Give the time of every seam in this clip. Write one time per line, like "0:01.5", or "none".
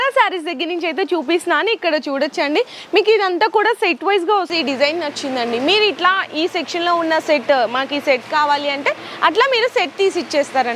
0:04.5

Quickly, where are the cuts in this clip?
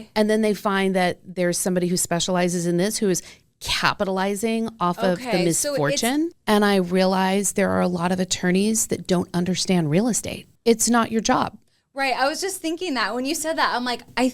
0:06.3
0:10.4

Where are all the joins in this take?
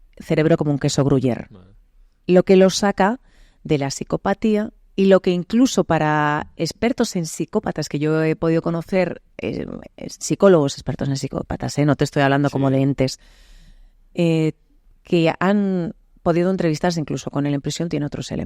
none

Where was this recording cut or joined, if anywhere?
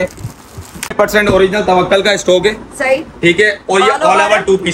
0:00.9

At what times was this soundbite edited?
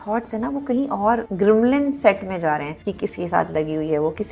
0:01.3
0:02.8

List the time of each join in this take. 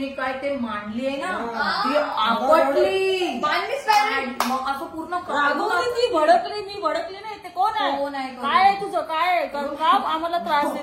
none

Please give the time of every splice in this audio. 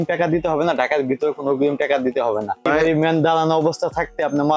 0:02.7

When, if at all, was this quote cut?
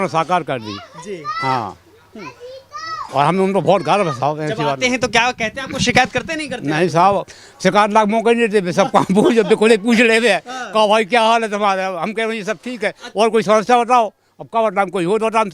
none

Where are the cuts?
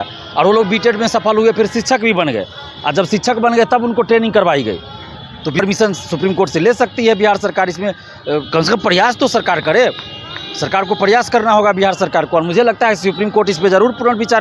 0:05.6

